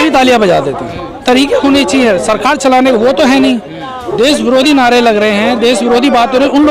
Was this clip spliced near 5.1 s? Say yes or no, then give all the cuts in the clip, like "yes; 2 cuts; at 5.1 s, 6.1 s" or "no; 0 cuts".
no; 1 cut; at 1.1 s